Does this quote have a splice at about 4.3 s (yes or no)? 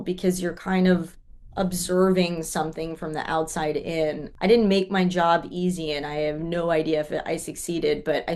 yes